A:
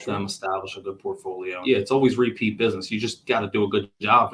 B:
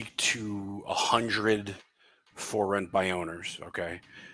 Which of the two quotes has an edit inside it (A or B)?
A